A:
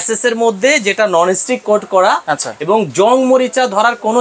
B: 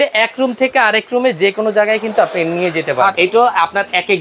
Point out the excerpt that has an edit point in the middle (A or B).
B